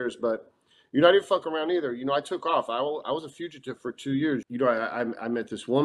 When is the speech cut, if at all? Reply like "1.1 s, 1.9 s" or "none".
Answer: 4.4 s